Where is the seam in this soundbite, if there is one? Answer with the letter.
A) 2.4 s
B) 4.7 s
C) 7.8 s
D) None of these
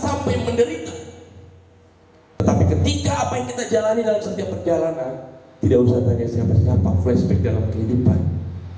A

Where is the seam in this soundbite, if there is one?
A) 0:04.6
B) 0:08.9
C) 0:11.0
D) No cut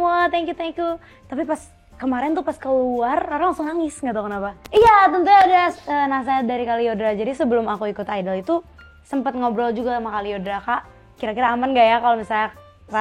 A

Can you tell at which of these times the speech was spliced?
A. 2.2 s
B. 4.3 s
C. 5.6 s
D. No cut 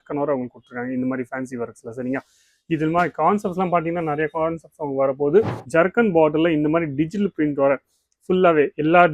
C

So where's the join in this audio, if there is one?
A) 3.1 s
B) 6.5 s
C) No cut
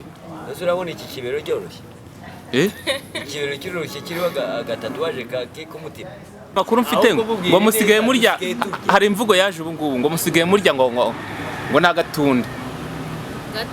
B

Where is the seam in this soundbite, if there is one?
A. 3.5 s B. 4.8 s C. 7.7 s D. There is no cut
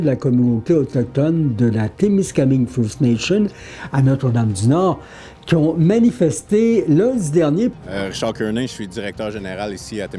C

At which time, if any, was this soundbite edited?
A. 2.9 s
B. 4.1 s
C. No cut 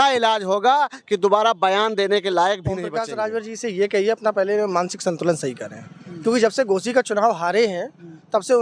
A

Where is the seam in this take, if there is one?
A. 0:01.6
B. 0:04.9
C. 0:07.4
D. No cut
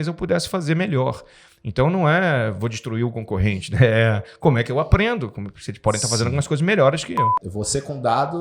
C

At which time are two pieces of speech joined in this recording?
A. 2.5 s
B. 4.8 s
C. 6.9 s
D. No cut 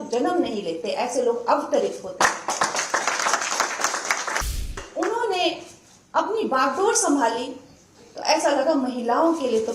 B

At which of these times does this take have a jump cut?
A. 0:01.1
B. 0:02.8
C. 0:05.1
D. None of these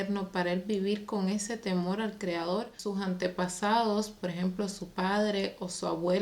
B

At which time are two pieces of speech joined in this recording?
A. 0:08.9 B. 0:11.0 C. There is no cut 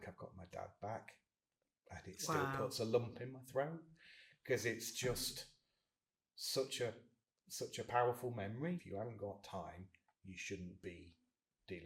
A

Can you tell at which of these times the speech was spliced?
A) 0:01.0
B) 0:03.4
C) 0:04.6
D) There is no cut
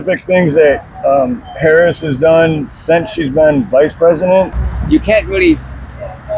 C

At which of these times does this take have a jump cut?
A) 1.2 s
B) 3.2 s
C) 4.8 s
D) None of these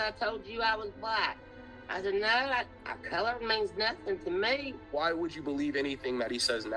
C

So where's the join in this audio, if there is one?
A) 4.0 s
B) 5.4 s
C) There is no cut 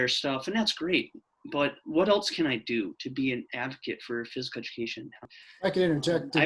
B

